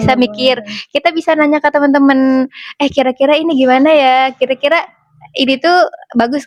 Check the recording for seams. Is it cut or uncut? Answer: uncut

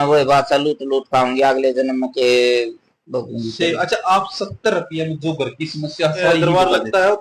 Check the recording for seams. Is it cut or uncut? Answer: cut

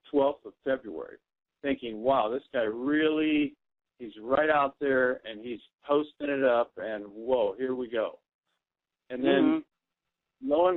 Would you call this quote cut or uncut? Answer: cut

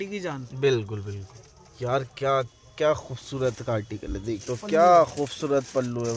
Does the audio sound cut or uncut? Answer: cut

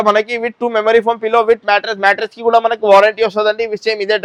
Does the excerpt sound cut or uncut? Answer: uncut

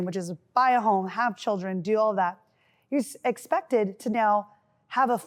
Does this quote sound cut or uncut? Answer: uncut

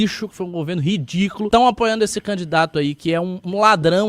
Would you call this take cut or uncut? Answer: cut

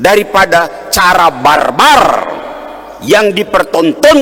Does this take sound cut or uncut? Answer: uncut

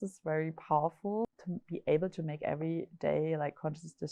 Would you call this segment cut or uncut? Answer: cut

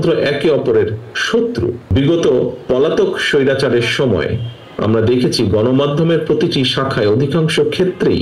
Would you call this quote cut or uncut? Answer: cut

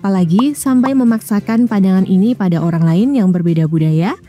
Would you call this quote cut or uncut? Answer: uncut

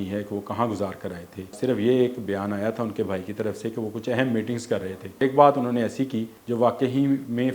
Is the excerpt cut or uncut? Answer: cut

